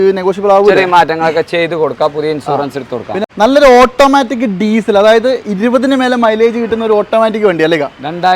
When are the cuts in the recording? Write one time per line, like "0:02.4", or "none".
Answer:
0:03.2